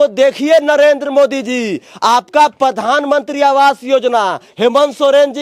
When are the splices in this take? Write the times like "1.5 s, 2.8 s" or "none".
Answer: none